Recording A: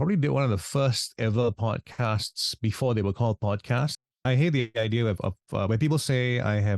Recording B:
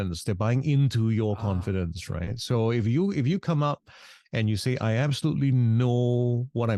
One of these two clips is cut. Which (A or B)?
A